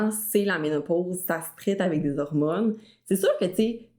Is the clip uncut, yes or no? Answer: yes